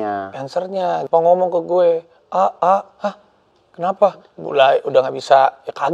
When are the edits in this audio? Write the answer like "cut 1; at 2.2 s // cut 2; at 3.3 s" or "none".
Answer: cut 1; at 1.1 s // cut 2; at 4.3 s